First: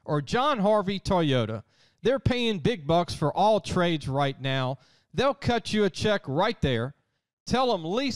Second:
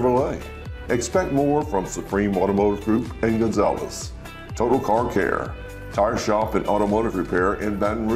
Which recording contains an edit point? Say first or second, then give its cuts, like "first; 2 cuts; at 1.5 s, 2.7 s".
second; 1 cut; at 4.2 s